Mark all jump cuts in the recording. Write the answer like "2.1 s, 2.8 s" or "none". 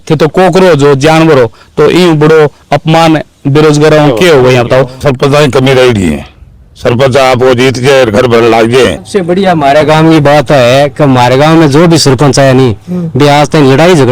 5.0 s, 9.0 s